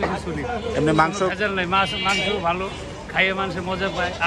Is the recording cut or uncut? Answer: uncut